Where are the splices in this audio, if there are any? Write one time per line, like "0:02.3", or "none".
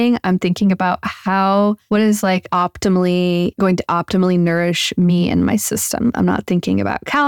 0:02.3
0:03.5